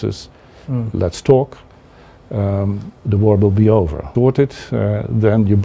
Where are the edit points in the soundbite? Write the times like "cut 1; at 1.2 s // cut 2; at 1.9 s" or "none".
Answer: cut 1; at 4.1 s